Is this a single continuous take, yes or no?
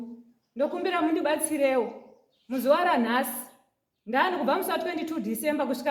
yes